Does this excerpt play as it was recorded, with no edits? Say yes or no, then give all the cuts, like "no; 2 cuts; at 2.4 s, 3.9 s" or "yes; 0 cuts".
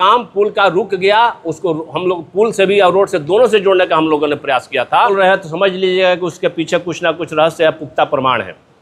no; 1 cut; at 5.1 s